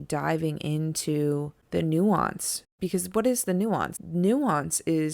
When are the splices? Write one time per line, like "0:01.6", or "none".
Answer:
0:01.6
0:02.8
0:04.0